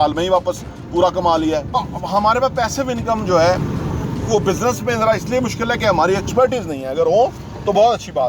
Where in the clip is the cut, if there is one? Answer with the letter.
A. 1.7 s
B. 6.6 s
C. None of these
A